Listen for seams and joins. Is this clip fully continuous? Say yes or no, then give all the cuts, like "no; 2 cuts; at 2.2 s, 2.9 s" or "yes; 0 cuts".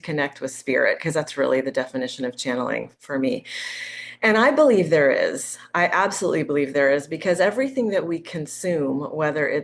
yes; 0 cuts